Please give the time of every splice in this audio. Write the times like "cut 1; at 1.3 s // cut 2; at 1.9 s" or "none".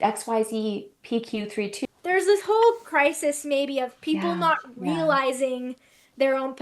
cut 1; at 1.7 s